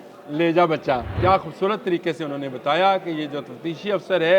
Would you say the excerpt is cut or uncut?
cut